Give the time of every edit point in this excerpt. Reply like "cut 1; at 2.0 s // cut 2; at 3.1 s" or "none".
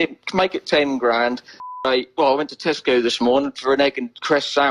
cut 1; at 1.7 s

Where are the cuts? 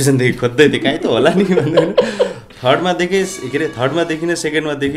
none

